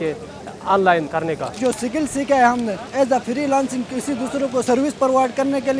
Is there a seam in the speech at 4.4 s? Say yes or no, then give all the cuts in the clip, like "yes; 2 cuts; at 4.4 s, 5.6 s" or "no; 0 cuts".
no; 2 cuts; at 1.6 s, 2.8 s